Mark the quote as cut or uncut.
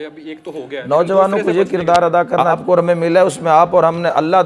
cut